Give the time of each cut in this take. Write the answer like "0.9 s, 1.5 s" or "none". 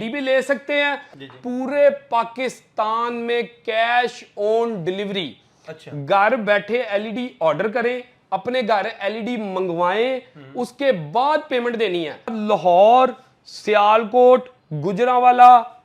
1.1 s, 12.4 s